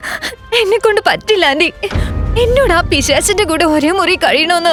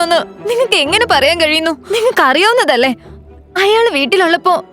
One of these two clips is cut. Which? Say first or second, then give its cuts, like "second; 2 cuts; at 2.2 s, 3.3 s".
second; 1 cut; at 1.8 s